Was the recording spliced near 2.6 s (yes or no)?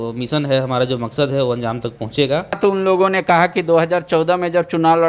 yes